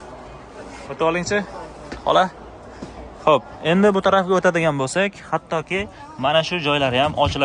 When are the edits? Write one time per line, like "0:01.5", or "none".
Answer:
none